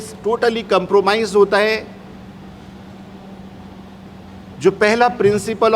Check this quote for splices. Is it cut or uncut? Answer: uncut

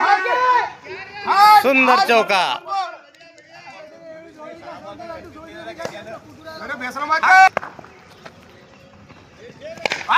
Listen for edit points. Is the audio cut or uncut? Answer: cut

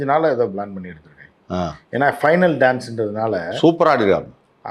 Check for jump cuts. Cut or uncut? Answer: uncut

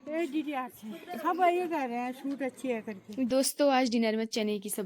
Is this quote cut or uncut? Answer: cut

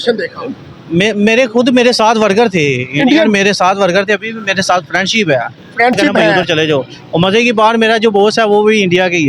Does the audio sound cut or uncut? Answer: cut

